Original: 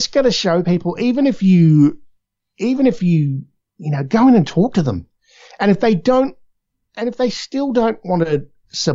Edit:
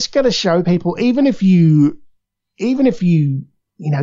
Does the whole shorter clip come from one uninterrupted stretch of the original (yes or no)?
yes